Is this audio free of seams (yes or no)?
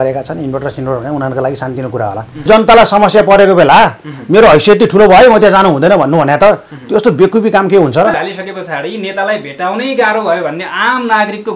no